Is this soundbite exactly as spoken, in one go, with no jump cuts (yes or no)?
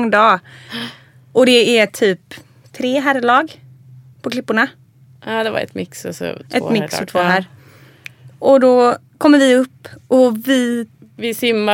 yes